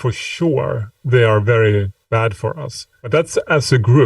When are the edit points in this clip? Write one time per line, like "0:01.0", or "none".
0:02.0
0:03.1